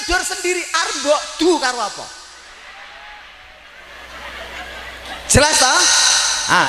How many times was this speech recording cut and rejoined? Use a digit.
1